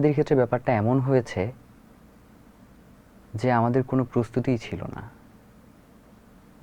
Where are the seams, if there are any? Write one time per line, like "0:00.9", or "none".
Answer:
none